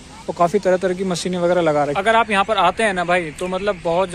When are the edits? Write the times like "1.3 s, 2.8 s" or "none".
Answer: 1.9 s